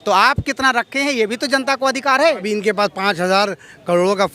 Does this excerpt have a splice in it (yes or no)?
yes